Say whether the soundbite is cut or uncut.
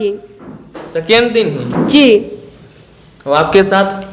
uncut